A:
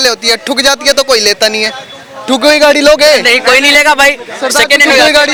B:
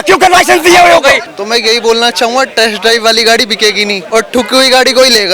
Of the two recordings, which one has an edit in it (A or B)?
B